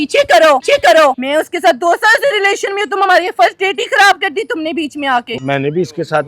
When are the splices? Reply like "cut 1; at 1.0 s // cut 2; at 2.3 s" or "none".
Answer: cut 1; at 1.0 s // cut 2; at 5.4 s